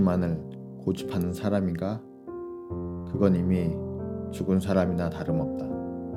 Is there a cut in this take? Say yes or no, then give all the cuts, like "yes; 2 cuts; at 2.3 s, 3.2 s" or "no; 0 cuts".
no; 0 cuts